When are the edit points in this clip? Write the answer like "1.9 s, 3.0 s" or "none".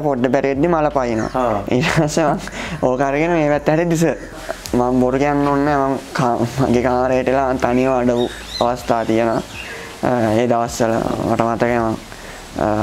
4.3 s